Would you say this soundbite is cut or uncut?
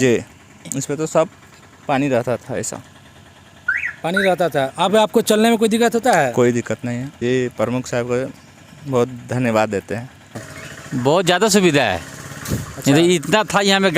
cut